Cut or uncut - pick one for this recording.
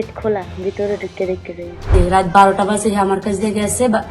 cut